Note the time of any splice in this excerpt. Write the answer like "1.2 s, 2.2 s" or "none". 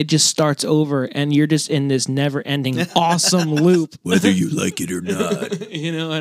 2.9 s

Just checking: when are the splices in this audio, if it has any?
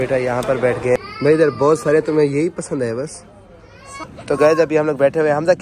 1.0 s, 4.0 s

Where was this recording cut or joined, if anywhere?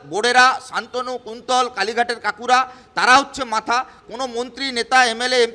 none

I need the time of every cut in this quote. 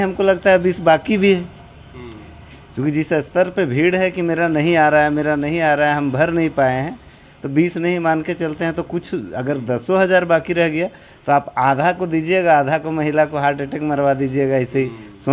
none

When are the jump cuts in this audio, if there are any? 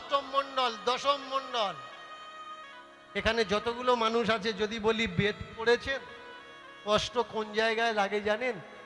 none

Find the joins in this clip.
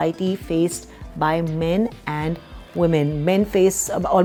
none

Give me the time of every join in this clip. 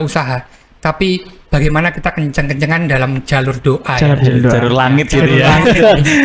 none

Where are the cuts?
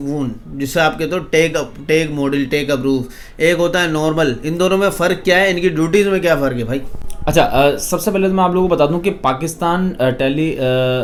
none

